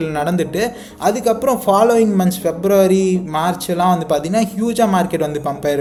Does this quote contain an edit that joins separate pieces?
no; 0 cuts

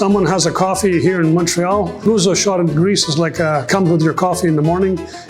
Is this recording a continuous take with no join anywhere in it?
no; 1 cut; at 2.0 s

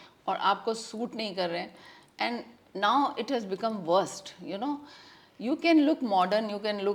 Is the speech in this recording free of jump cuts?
yes; 0 cuts

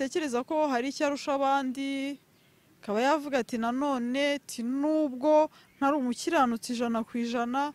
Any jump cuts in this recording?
no; 0 cuts

